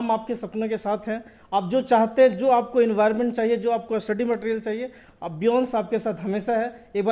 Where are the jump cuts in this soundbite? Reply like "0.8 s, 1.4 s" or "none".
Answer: none